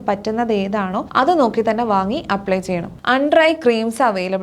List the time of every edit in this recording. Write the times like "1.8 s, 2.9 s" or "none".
1.1 s, 2.9 s